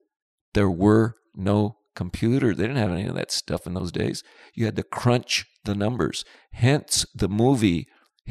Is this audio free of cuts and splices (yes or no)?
yes